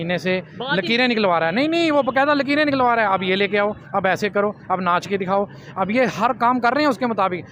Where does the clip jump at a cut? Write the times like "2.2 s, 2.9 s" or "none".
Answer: none